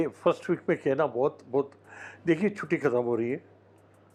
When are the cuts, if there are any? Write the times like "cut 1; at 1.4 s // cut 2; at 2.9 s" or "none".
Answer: none